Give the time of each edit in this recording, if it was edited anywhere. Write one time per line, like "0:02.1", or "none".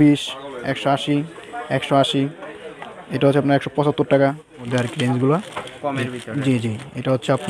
0:04.7